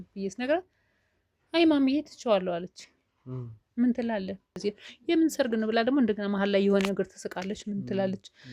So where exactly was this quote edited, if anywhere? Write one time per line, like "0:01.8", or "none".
0:04.6